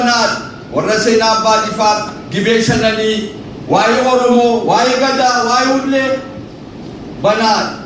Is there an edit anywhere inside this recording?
no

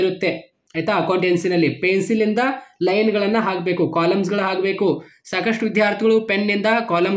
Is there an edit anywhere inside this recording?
no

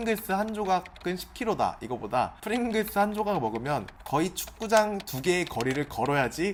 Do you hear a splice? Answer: no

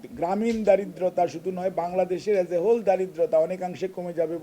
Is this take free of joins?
yes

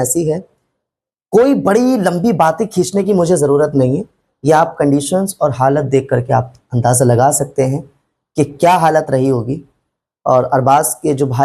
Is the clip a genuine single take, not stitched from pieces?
yes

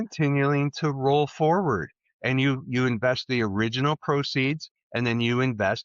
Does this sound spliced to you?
no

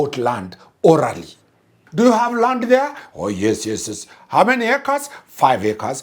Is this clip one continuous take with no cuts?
no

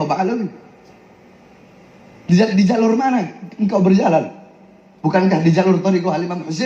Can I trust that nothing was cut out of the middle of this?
yes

